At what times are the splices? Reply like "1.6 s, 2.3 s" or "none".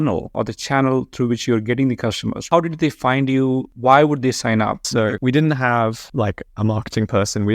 2.5 s, 3.7 s, 5.1 s